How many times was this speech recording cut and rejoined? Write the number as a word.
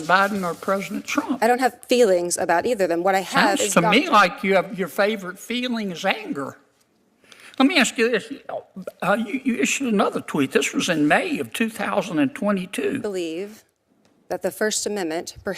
one